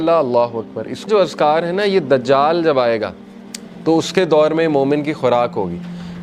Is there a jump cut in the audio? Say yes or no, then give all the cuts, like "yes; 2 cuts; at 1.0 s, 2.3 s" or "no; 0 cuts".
yes; 1 cut; at 1.1 s